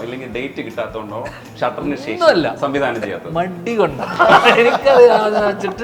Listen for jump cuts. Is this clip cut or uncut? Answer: uncut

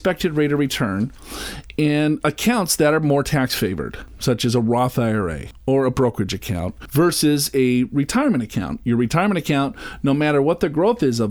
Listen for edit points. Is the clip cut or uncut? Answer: uncut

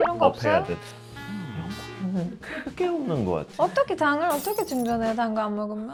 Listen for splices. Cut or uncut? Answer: uncut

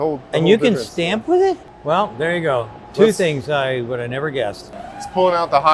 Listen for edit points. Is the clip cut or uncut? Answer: cut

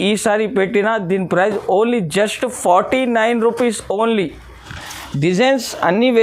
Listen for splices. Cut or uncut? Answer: cut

